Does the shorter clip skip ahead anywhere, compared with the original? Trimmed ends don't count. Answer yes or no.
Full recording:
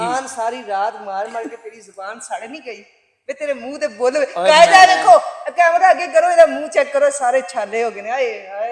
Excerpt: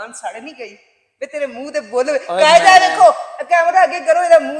no